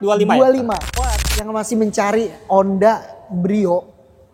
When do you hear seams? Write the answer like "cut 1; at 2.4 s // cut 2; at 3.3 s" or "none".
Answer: cut 1; at 1.0 s